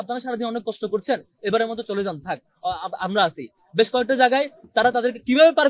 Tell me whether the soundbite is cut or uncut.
uncut